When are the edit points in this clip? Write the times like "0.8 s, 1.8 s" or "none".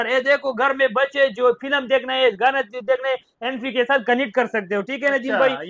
none